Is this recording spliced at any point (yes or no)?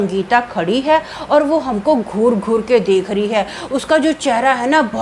no